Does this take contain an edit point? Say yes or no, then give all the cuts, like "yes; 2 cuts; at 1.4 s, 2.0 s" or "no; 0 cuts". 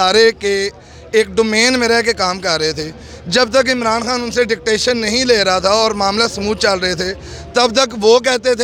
no; 0 cuts